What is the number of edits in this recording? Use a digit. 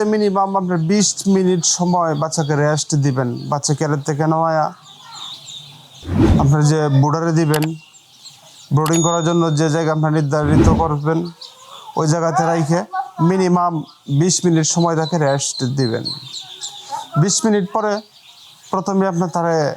0